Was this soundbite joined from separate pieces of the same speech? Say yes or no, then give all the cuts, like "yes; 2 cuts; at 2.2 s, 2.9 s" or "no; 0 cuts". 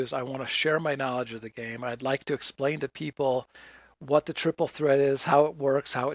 no; 0 cuts